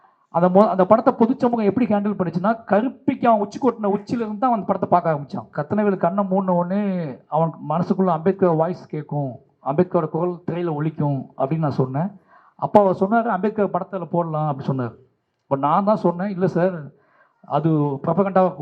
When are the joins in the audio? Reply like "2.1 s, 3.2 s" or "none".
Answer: 5.5 s